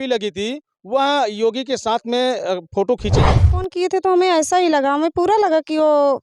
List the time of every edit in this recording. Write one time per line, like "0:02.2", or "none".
0:03.4